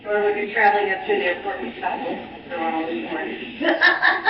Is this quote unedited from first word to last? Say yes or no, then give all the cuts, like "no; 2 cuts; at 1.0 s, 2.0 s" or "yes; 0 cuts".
yes; 0 cuts